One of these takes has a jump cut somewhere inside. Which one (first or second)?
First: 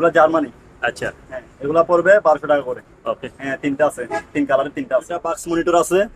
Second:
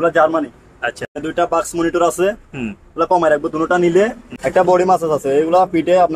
second